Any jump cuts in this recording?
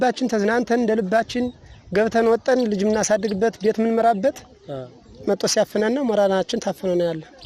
no; 0 cuts

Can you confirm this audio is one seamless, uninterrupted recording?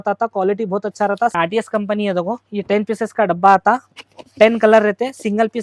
no; 2 cuts; at 1.3 s, 2.4 s

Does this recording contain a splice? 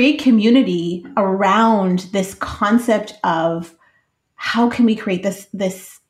yes; 1 cut; at 1.1 s

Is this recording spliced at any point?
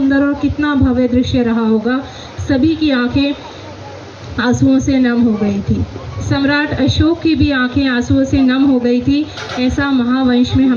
no; 0 cuts

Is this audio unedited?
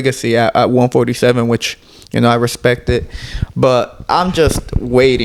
yes; 0 cuts

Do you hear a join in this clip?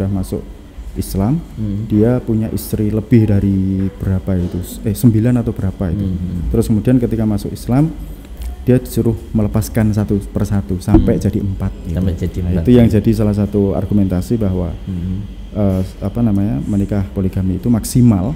no; 0 cuts

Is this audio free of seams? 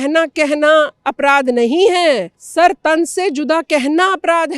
no; 1 cut; at 2.4 s

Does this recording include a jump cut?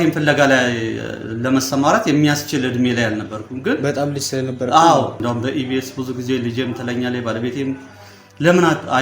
yes; 1 cut; at 5.2 s

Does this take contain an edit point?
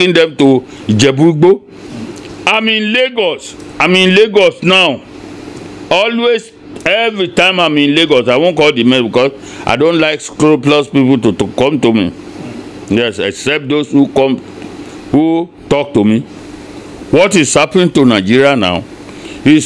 yes; 1 cut; at 16.4 s

